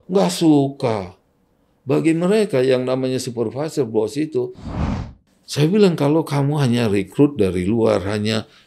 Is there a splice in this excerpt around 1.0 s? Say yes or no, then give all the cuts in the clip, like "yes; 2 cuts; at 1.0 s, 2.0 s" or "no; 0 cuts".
no; 1 cut; at 5.0 s